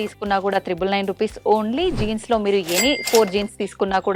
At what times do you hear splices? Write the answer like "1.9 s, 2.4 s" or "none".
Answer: none